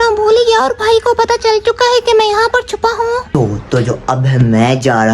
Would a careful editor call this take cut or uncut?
cut